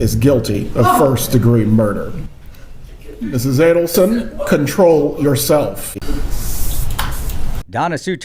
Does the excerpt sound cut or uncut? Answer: cut